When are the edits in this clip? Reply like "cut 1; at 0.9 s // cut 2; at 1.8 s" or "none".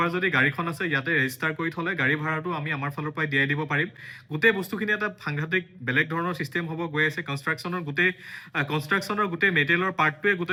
none